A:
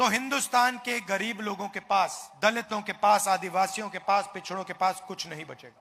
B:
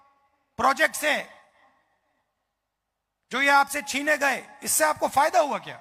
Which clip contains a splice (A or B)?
A